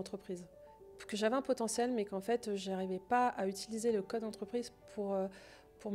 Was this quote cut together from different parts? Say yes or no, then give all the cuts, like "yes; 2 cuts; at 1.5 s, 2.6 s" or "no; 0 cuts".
no; 0 cuts